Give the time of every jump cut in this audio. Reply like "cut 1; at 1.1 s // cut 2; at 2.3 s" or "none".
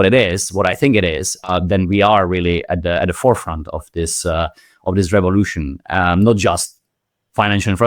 cut 1; at 1.3 s